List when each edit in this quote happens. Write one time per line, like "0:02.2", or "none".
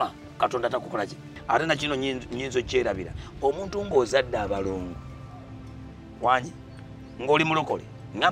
0:01.3